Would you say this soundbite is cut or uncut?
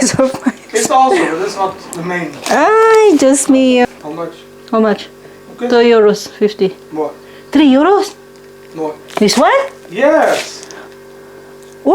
cut